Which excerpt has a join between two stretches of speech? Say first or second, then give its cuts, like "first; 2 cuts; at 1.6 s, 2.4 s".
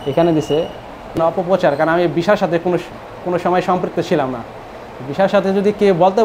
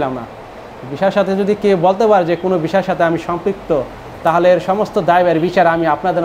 first; 1 cut; at 1.2 s